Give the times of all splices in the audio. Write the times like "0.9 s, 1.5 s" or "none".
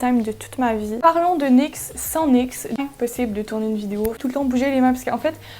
1.0 s, 2.8 s, 4.2 s